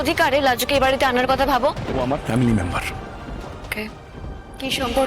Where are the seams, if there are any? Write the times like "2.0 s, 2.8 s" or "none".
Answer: 1.8 s